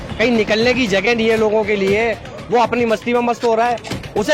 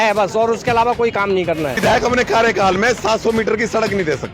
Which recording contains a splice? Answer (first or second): second